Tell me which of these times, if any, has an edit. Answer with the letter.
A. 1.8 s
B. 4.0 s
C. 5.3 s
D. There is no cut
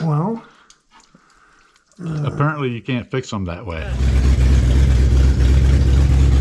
B